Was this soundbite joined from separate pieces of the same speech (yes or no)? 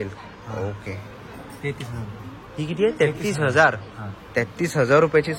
no